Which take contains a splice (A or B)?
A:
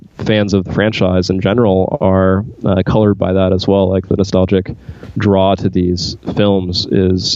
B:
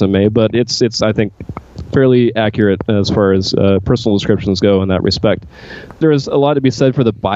B